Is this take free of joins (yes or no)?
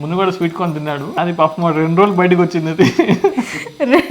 no